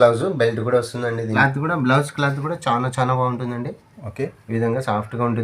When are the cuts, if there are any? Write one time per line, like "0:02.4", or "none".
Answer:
0:01.4